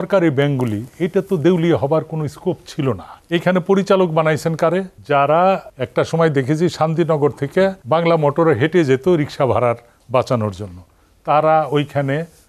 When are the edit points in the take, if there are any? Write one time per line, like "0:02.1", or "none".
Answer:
0:03.1
0:04.9
0:05.8
0:07.8